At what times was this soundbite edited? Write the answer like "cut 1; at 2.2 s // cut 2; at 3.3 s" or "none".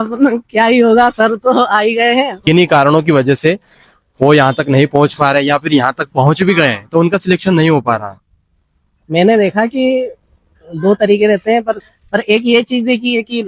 cut 1; at 2.3 s // cut 2; at 11.8 s